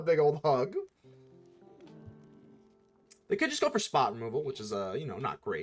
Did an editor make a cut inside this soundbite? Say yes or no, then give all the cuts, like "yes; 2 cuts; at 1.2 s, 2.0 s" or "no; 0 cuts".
no; 0 cuts